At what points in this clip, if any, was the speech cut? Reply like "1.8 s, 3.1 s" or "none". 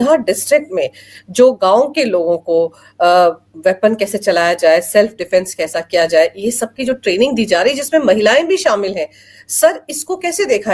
none

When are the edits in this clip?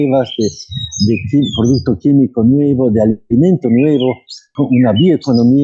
4.5 s

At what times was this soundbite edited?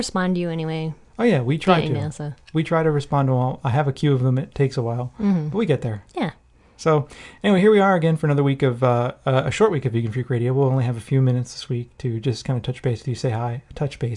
7.9 s

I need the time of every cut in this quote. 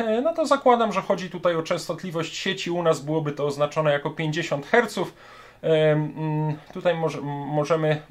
none

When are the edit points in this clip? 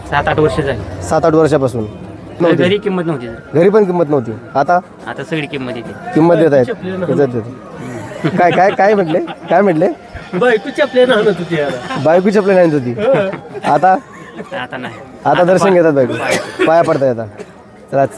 2.4 s

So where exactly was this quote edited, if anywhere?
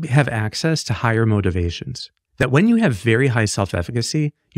2.4 s

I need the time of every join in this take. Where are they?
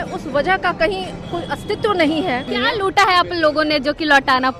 2.5 s

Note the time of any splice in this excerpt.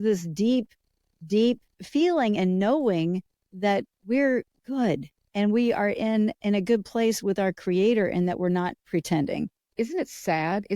1.7 s, 9.7 s

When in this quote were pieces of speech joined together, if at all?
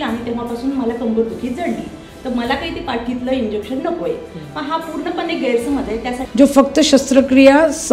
6.2 s

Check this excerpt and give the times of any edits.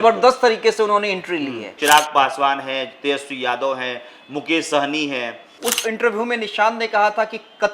1.7 s, 5.4 s

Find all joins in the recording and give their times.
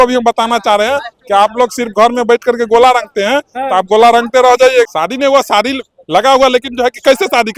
4.9 s

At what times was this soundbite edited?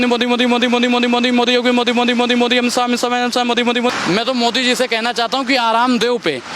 3.9 s

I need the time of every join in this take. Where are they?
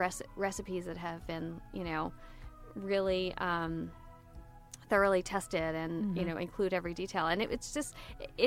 none

